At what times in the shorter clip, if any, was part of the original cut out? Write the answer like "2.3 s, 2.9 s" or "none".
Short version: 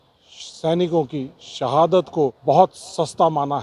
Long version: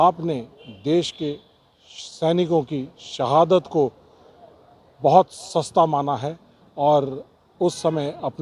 2.4 s